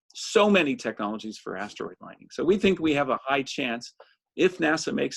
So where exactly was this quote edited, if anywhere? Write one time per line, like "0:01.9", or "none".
none